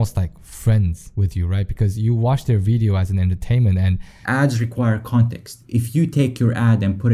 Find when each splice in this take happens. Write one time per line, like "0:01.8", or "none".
0:01.0
0:04.2
0:05.6

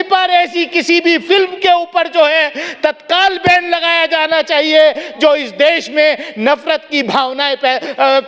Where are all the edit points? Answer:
none

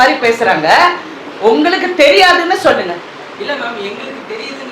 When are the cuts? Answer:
none

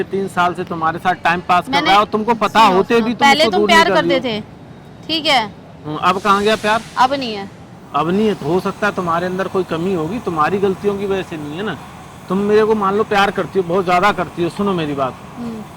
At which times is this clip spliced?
none

